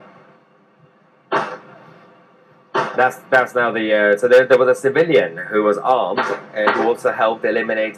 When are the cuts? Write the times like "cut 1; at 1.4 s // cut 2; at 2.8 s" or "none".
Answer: none